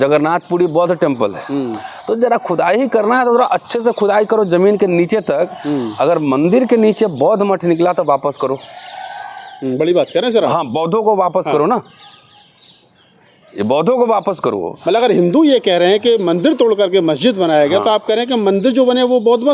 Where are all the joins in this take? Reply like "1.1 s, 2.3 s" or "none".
none